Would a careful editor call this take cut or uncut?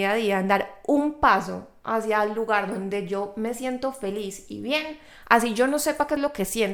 uncut